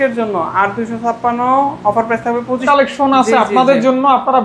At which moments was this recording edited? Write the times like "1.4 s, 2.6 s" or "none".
2.6 s